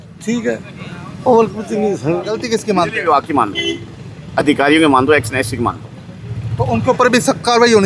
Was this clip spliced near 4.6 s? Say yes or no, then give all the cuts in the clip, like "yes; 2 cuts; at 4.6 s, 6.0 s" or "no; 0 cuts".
no; 1 cut; at 2.4 s